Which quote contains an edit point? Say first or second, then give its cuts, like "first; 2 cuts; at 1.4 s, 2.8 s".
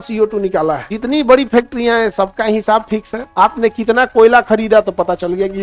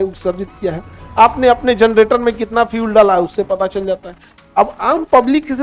first; 2 cuts; at 0.9 s, 3.2 s